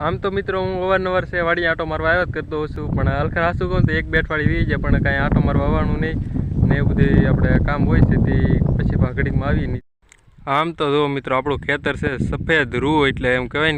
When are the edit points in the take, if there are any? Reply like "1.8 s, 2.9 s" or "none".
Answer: none